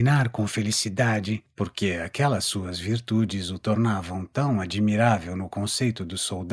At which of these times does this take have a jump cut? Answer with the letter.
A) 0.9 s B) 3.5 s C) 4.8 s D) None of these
D